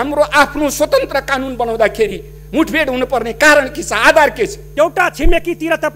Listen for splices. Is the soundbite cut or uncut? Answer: cut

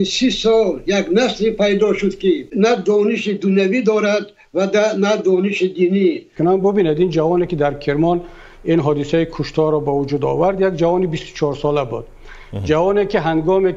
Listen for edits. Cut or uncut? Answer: cut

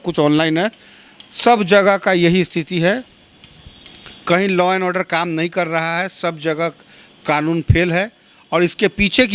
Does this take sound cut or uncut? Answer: uncut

